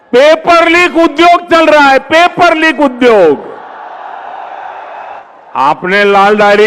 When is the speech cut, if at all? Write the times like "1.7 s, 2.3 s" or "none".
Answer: 5.0 s